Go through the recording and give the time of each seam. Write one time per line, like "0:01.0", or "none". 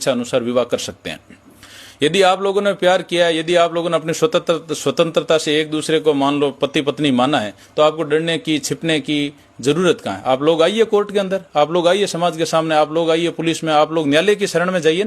none